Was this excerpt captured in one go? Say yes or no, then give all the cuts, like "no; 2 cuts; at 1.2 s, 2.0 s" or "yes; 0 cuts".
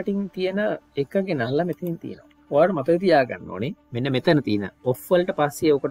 yes; 0 cuts